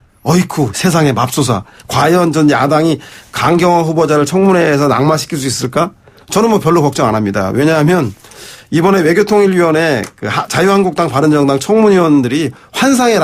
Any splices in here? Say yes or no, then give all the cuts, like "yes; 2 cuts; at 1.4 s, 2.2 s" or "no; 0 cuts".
no; 0 cuts